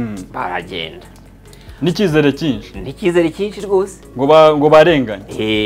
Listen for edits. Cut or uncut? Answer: uncut